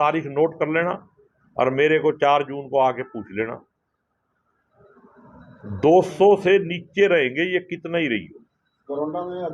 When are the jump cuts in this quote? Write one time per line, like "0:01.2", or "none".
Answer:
none